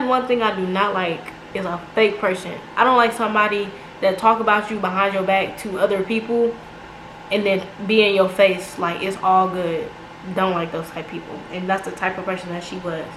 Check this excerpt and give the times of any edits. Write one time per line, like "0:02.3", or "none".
none